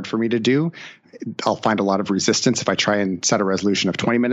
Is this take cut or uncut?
cut